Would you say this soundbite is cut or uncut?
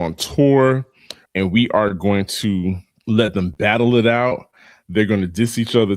cut